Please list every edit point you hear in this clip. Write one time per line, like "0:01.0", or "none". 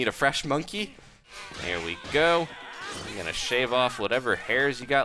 0:01.4